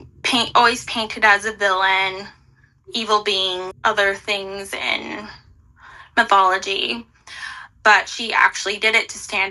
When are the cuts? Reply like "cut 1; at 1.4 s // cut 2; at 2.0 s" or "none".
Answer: cut 1; at 3.7 s